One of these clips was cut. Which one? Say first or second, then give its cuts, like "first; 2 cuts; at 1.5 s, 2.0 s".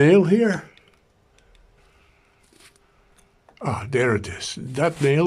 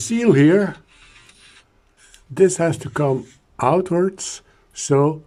first; 1 cut; at 1.8 s